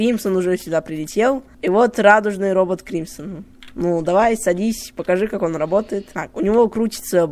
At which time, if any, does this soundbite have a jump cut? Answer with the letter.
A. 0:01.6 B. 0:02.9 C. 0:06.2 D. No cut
C